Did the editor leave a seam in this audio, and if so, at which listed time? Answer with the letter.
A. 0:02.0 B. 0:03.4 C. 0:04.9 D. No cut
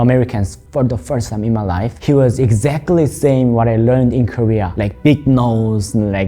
A